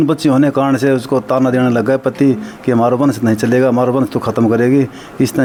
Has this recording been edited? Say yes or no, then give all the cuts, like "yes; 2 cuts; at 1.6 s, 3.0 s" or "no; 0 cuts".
no; 0 cuts